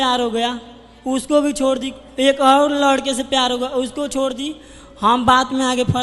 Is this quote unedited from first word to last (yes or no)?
yes